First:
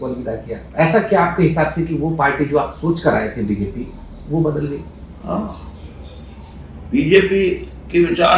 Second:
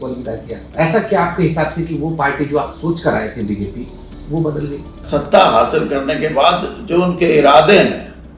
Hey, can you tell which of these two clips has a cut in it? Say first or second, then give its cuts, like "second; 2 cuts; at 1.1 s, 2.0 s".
second; 1 cut; at 5.1 s